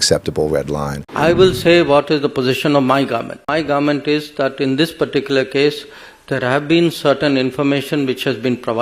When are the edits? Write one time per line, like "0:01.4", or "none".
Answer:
0:01.0
0:03.5